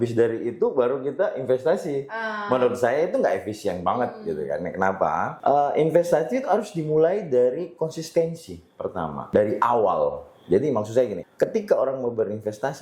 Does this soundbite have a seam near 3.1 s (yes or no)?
no